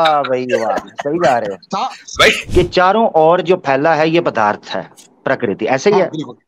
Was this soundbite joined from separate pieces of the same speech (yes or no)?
yes